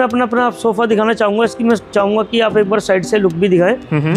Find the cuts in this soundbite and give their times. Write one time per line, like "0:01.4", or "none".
none

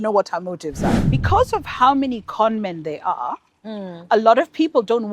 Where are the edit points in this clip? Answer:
0:01.0

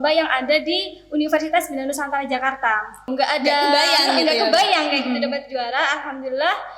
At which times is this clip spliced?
0:03.1

